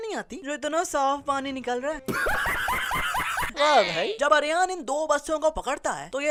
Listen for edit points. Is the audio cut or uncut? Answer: uncut